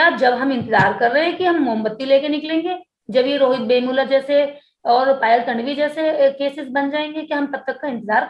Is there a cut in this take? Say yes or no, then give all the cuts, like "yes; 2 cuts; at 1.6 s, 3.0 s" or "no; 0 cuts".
no; 0 cuts